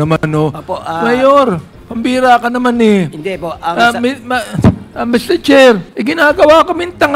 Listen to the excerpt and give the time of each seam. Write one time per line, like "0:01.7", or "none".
0:06.0